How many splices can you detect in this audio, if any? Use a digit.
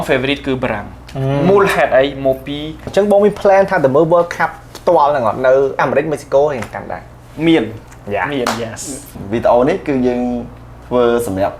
3